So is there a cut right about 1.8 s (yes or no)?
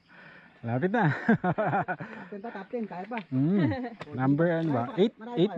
no